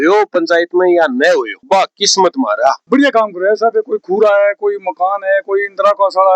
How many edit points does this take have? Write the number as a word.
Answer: one